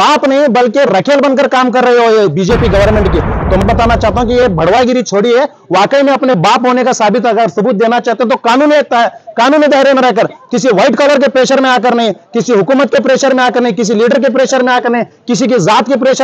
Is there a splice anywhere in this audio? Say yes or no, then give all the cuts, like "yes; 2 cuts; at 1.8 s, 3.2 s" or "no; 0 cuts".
yes; 1 cut; at 3.6 s